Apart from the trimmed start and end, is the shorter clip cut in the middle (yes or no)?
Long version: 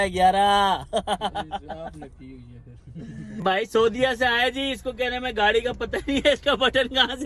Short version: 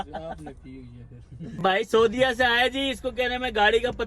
yes